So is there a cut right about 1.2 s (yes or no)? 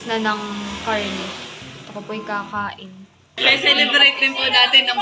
no